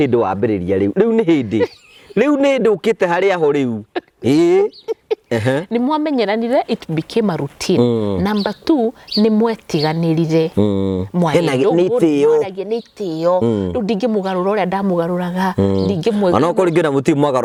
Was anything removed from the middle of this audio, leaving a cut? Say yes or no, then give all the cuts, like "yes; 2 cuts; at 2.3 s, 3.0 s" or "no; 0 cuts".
no; 0 cuts